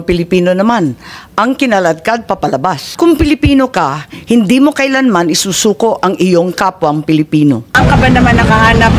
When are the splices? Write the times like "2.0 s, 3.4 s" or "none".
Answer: 2.9 s, 7.8 s

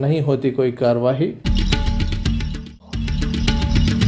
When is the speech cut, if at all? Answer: 1.4 s

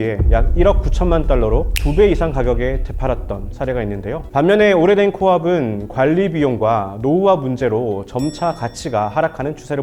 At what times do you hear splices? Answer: 4.2 s

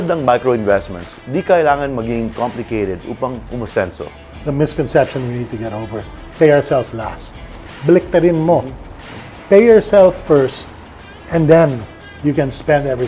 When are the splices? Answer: 4.2 s

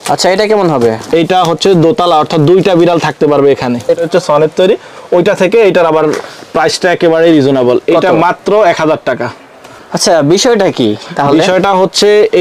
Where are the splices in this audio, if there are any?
none

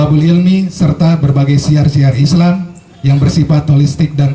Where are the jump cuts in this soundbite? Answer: none

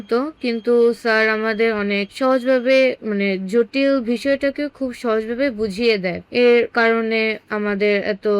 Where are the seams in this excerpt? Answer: none

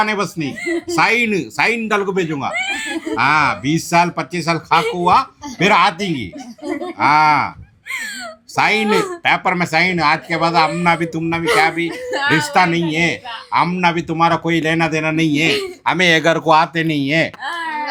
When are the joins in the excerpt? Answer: none

